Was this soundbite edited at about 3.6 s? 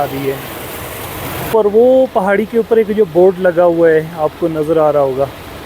no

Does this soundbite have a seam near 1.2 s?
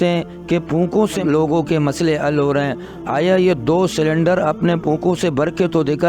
yes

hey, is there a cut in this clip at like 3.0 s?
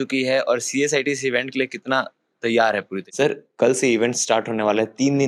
yes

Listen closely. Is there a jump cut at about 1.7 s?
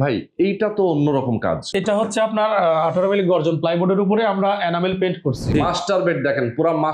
yes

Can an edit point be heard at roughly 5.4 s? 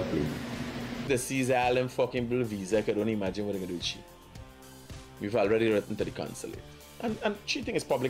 no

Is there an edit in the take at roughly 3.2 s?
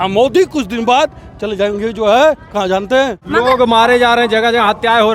yes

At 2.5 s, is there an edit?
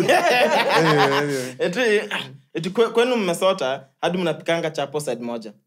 no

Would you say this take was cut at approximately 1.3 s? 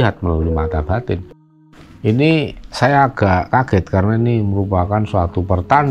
yes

